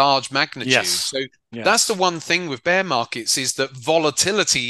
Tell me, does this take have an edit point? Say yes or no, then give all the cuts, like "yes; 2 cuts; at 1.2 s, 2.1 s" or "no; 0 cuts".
no; 0 cuts